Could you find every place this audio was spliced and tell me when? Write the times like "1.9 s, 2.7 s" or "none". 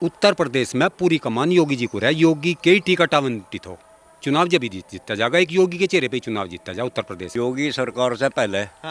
7.2 s